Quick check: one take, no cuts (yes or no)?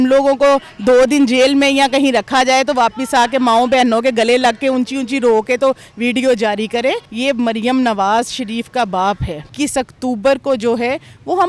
no